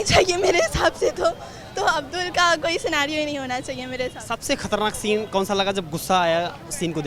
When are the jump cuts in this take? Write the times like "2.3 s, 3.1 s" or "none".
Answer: none